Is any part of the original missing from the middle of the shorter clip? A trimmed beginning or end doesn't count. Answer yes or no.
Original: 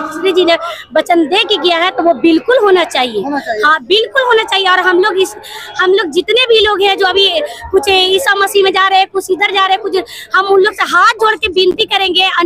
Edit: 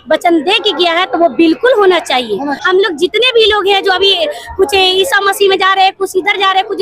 yes